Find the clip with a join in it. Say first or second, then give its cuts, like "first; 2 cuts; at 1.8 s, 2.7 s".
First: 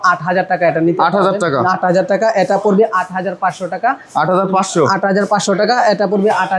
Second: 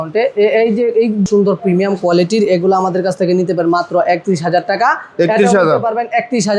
second; 1 cut; at 1.3 s